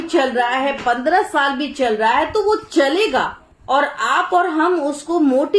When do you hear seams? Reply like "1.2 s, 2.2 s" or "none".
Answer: none

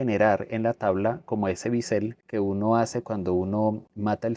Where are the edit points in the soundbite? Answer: none

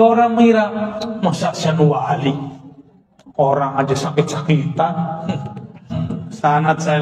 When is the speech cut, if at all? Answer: 6.0 s

